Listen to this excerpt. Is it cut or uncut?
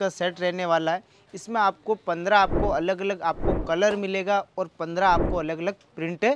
uncut